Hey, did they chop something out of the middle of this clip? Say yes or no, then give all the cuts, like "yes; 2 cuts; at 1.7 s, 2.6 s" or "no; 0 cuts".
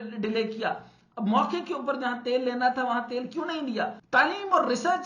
yes; 1 cut; at 4.0 s